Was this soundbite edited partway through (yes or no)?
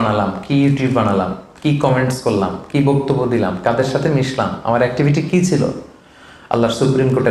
no